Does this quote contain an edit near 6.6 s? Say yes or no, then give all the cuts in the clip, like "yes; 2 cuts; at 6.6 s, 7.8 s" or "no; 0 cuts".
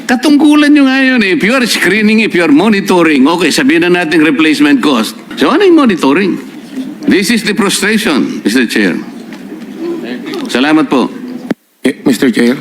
yes; 2 cuts; at 5.2 s, 6.6 s